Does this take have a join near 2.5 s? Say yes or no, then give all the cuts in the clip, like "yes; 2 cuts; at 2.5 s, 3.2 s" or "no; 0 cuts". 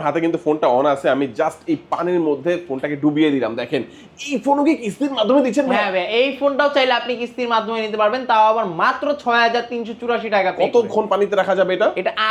no; 0 cuts